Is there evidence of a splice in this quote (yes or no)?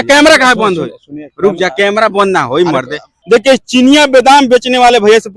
yes